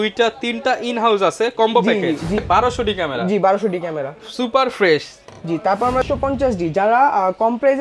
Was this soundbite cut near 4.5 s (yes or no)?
no